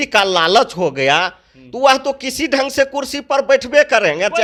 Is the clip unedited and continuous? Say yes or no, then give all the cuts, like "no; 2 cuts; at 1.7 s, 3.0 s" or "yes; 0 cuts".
yes; 0 cuts